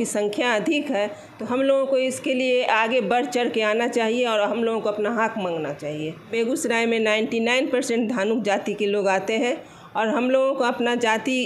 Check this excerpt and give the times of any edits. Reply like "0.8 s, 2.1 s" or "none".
6.3 s